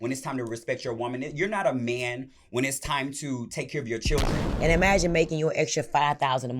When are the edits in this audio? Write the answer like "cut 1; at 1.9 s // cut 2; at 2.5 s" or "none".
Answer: cut 1; at 4.4 s